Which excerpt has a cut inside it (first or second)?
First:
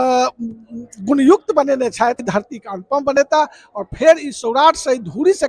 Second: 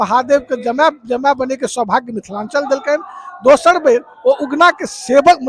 first